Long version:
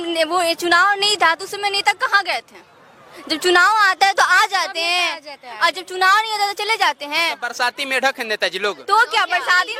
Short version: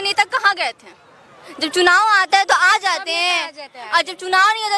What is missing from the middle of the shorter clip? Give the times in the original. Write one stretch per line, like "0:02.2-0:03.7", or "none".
none